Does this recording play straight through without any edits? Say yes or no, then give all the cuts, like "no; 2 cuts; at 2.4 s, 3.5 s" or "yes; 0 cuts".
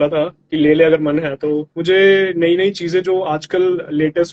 no; 1 cut; at 1.8 s